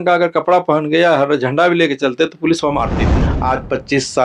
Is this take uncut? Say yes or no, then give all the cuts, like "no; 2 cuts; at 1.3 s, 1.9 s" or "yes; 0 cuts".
no; 1 cut; at 3.3 s